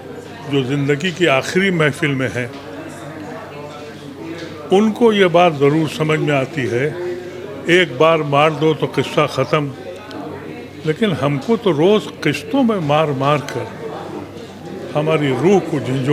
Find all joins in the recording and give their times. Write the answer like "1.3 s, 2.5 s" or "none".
none